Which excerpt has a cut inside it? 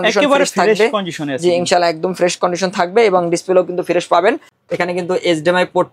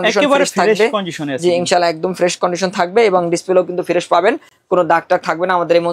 first; 1 cut; at 4.5 s

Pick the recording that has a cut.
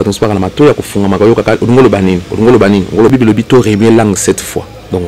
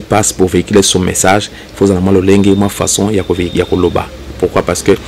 first; 1 cut; at 3.1 s

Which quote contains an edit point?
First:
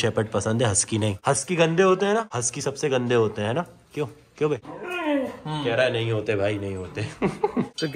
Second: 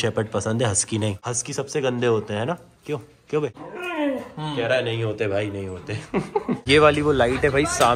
second; 2 cuts; at 1.2 s, 6.7 s

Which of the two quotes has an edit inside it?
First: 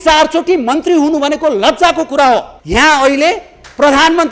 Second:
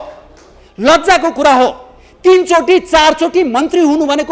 first; 1 cut; at 2.6 s

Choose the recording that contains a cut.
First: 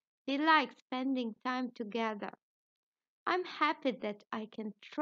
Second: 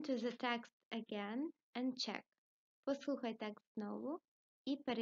first; 1 cut; at 4.0 s

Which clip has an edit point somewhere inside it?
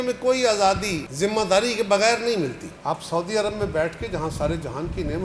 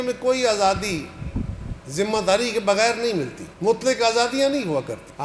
first; 2 cuts; at 1.0 s, 2.7 s

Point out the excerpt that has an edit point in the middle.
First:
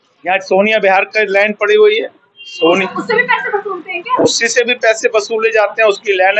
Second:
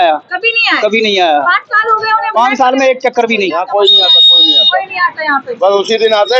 second; 1 cut; at 3.5 s

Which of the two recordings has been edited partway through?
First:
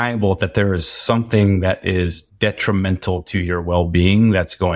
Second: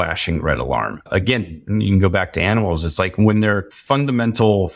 second; 2 cuts; at 1.1 s, 3.7 s

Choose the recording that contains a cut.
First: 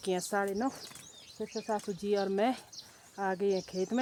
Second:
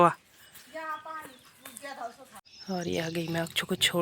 second; 1 cut; at 2.3 s

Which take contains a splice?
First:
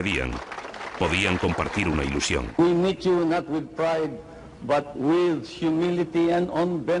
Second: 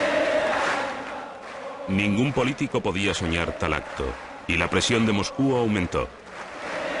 second; 1 cut; at 1.7 s

